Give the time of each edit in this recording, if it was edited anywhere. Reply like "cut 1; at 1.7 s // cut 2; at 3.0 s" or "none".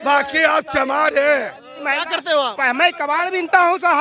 cut 1; at 1.8 s

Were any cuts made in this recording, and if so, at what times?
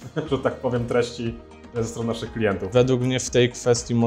cut 1; at 2.6 s

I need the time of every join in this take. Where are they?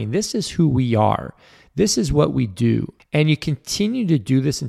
cut 1; at 3.0 s

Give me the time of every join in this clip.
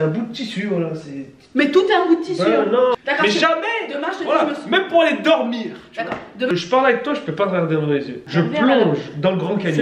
cut 1; at 3.0 s // cut 2; at 6.5 s // cut 3; at 8.2 s

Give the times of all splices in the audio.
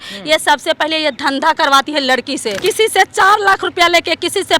cut 1; at 2.5 s

